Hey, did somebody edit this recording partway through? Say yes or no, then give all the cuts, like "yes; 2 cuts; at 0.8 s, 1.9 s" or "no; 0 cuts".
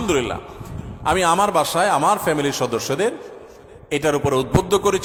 no; 0 cuts